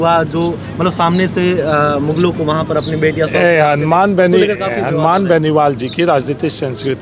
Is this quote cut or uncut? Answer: uncut